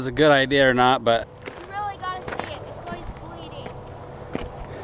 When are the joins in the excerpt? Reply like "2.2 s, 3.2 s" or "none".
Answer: 1.3 s